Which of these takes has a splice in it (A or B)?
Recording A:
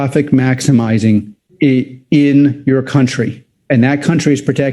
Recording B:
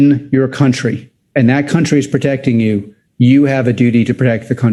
A